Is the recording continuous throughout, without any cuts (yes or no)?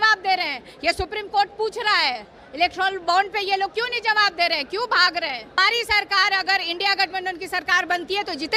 no